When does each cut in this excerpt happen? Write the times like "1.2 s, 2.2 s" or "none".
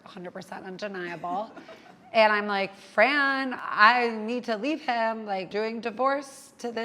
3.6 s, 5.5 s